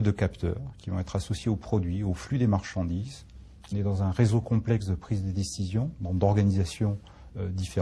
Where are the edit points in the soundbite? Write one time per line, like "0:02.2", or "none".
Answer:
none